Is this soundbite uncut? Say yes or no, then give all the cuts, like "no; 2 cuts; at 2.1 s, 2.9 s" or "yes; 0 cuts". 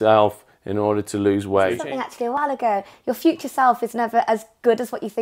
no; 1 cut; at 2.3 s